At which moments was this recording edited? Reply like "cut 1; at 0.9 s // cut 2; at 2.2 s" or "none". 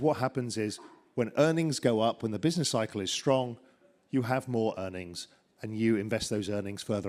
none